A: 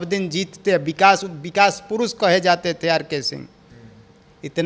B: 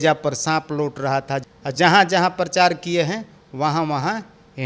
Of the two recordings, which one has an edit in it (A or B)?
B